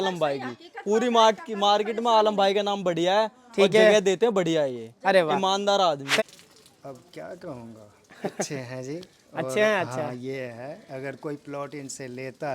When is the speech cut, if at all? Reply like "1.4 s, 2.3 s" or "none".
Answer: 6.2 s